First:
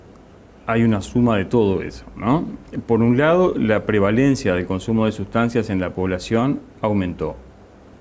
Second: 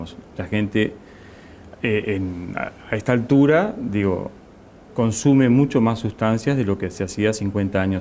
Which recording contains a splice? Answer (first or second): first